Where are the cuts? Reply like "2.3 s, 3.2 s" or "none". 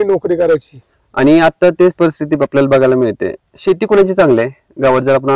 none